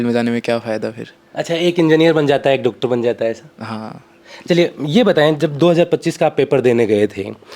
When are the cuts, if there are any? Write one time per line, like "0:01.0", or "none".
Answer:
none